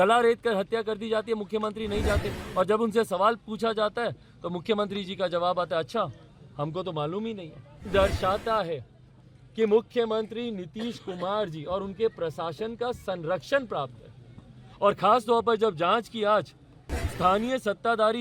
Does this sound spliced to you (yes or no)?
yes